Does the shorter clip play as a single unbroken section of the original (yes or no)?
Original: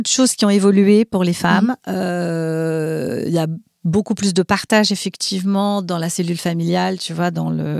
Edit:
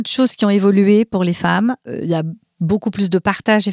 no